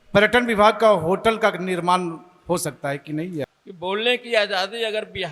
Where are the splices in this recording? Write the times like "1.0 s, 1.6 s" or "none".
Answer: 3.6 s